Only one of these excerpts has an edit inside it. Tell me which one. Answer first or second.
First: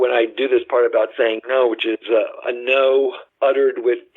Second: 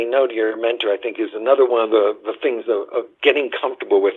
first